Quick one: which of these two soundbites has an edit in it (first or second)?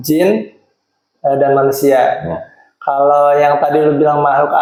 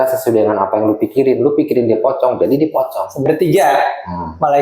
second